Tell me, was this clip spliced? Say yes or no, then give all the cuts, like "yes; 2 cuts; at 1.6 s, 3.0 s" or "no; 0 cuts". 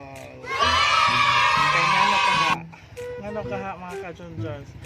no; 0 cuts